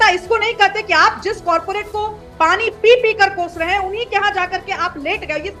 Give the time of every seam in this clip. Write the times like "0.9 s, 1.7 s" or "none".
none